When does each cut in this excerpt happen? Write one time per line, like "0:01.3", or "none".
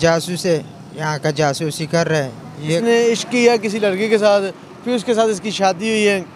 0:02.8